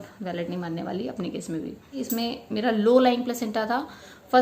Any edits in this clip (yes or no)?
yes